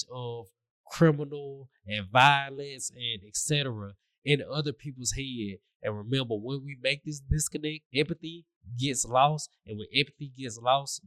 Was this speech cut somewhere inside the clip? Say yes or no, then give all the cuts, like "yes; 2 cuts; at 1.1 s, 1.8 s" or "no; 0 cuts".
yes; 1 cut; at 7.8 s